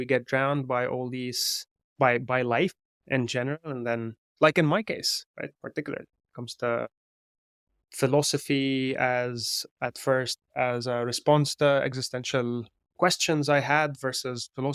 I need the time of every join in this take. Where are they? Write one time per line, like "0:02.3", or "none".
none